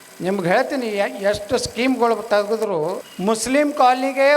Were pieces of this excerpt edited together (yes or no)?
yes